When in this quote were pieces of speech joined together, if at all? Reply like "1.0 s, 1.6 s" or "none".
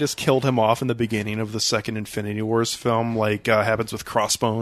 none

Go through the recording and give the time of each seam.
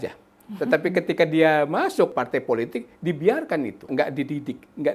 2.1 s, 3.9 s

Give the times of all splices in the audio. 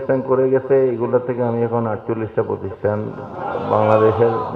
none

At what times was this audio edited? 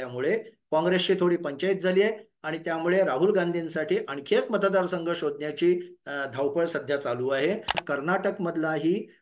7.8 s

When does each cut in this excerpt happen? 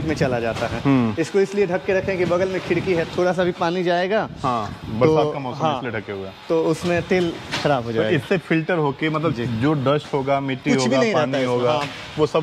none

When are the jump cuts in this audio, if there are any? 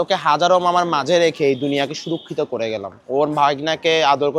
none

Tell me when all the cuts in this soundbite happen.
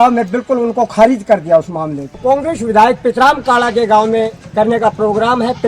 2.2 s, 4.4 s

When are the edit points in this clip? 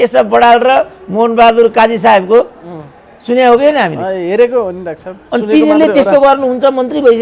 none

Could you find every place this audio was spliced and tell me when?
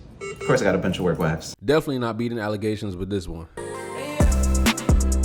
3.6 s

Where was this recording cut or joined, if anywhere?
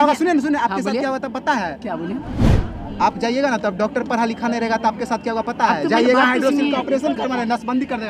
none

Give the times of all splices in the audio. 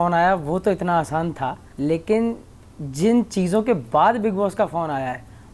1.6 s

